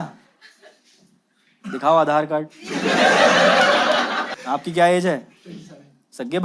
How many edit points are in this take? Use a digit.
1